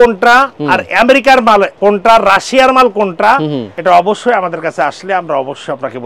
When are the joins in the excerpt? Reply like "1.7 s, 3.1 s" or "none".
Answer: 1.7 s, 3.7 s